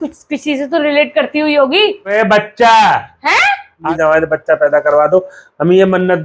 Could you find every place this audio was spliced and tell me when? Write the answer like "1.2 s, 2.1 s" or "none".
2.0 s, 3.8 s